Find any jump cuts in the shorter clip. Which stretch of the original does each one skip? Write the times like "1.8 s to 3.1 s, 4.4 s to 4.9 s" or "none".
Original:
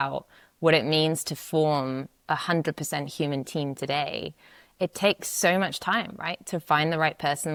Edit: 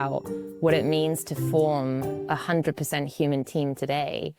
none